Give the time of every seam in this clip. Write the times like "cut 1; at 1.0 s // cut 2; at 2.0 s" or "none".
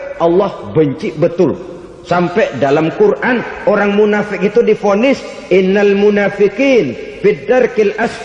none